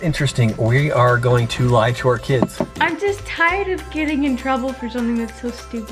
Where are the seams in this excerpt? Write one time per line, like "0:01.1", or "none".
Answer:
0:02.7